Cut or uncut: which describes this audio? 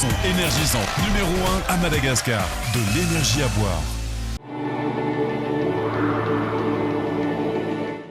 cut